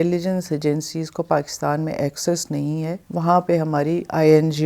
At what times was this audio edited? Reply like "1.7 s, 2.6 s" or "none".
none